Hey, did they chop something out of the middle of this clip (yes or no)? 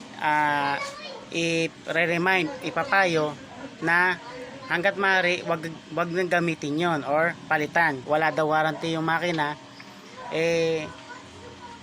yes